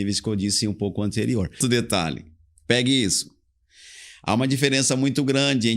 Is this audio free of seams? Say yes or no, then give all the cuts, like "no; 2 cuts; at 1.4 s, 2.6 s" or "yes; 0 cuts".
no; 1 cut; at 1.6 s